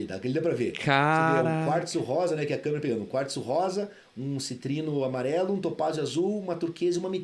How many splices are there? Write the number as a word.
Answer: zero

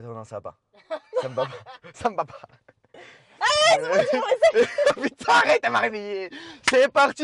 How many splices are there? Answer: zero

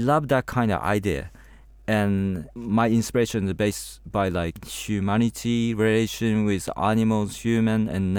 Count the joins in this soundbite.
two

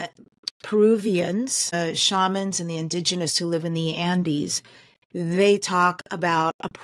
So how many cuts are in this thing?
one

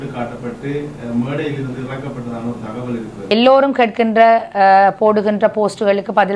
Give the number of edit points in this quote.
one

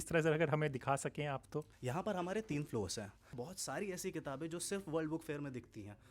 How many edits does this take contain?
two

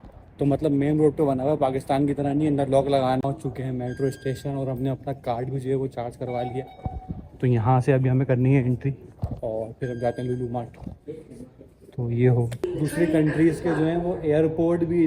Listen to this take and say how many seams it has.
two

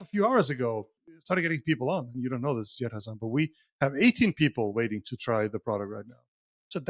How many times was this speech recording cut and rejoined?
one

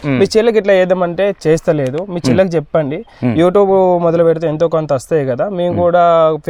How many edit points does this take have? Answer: zero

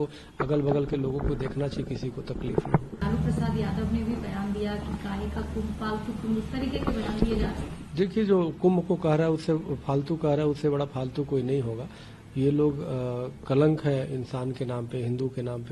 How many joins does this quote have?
zero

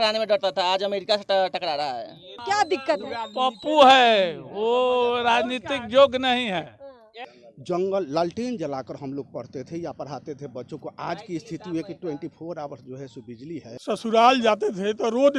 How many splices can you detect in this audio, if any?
three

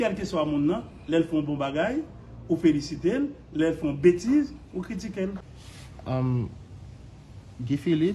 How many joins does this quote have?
one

